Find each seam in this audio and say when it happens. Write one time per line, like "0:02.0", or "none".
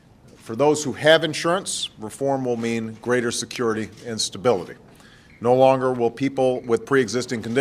0:05.9